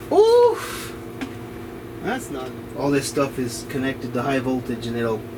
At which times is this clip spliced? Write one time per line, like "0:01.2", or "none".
0:02.3